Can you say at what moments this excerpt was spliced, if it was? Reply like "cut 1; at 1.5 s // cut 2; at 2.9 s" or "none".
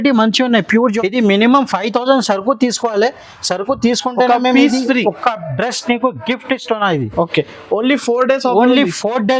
cut 1; at 0.9 s